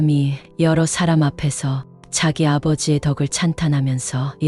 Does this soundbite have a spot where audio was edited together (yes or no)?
no